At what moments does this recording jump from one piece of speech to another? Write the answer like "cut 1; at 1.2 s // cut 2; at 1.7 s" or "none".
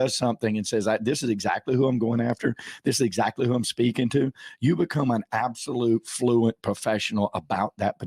none